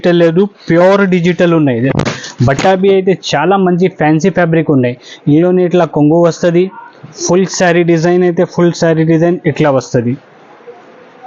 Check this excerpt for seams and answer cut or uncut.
uncut